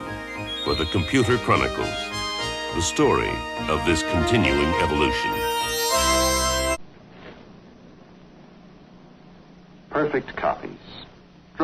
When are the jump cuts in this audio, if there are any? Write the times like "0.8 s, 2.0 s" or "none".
6.8 s

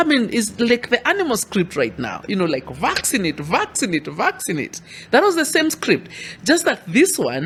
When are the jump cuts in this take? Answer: none

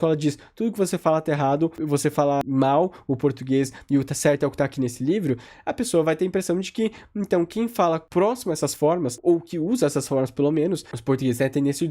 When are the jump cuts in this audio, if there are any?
2.0 s

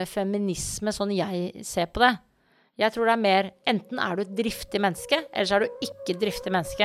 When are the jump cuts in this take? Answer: none

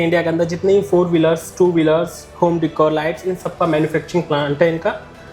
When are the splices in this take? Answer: none

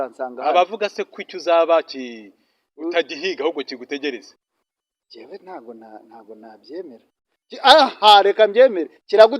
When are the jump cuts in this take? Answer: none

